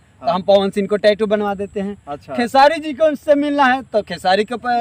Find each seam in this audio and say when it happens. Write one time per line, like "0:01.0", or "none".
none